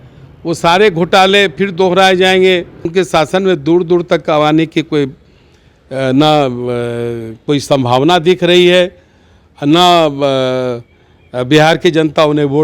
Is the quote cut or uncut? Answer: cut